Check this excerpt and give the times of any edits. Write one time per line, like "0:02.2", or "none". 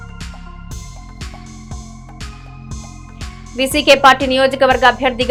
none